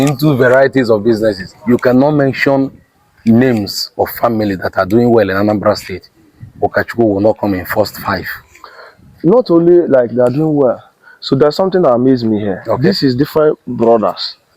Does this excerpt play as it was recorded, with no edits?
no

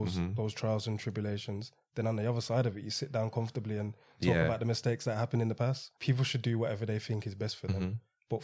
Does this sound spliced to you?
yes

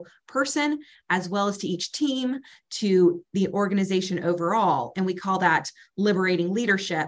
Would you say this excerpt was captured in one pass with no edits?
yes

